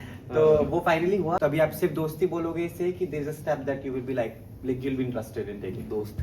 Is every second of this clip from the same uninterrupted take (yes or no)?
no